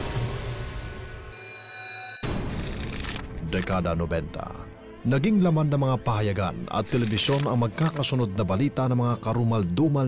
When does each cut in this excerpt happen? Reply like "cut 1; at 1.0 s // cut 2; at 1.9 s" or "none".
none